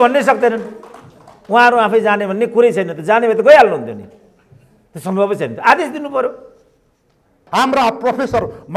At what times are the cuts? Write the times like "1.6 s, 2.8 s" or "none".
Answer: 7.4 s